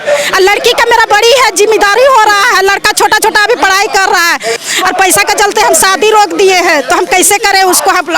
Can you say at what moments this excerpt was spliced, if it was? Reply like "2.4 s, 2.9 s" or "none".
4.6 s